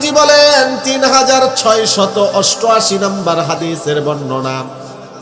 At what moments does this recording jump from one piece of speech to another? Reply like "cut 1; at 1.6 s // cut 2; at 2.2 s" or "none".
none